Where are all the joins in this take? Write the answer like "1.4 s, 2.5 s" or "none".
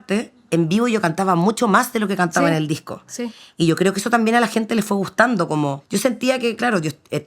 5.8 s